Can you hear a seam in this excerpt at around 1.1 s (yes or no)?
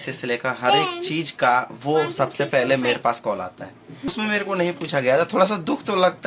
no